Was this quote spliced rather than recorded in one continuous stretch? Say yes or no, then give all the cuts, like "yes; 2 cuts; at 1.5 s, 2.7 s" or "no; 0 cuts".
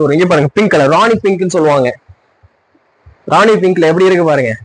no; 0 cuts